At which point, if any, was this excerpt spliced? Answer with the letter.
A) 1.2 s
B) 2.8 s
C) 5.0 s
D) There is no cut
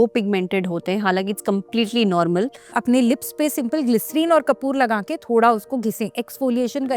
B